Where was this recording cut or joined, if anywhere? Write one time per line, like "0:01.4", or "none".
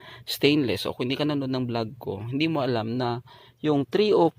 none

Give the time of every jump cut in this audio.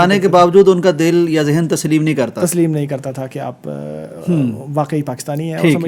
none

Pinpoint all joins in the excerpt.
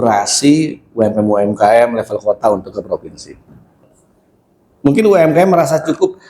0:03.7

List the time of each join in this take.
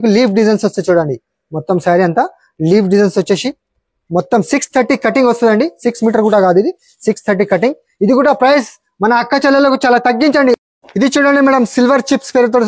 0:10.6

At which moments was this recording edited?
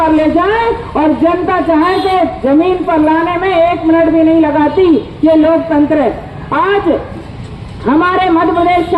none

